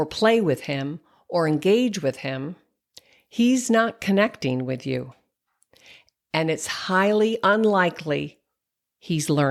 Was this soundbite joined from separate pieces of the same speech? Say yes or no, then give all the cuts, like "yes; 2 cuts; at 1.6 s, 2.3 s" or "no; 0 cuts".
no; 0 cuts